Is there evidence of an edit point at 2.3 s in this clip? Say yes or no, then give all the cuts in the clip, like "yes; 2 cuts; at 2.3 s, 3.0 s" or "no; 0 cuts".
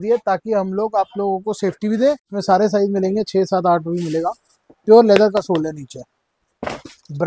yes; 1 cut; at 2.3 s